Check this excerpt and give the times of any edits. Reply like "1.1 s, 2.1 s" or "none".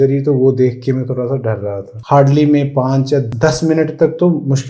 1.9 s, 3.3 s